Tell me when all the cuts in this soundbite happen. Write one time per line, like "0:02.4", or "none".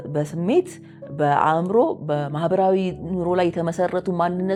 none